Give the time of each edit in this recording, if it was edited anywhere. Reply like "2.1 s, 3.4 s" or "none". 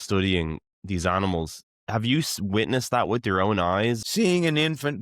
4.0 s